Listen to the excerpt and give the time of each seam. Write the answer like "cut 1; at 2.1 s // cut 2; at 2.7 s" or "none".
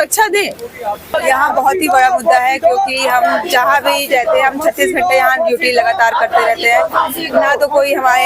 cut 1; at 1.1 s